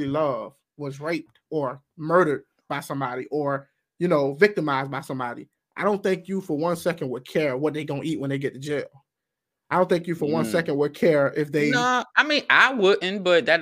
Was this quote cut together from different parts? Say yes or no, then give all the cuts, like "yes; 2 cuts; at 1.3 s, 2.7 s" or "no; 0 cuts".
no; 0 cuts